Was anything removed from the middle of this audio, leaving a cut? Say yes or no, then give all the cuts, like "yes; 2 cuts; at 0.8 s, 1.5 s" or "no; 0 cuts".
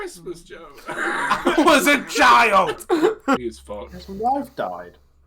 yes; 1 cut; at 3.4 s